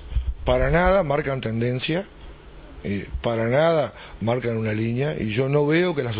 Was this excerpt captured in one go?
yes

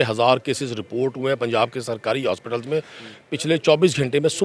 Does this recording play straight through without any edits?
yes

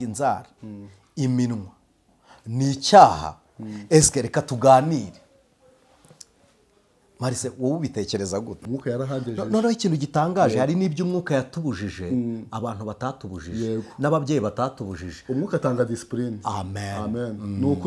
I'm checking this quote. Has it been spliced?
yes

